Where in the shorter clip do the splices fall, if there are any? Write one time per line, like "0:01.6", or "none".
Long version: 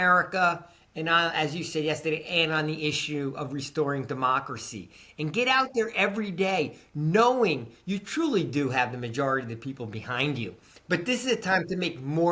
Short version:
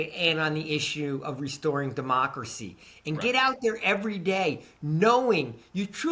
none